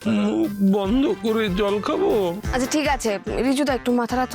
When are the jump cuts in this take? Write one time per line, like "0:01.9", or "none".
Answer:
0:02.4